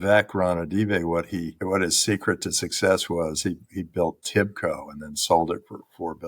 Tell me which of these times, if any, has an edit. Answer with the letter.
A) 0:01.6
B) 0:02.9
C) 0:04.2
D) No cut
A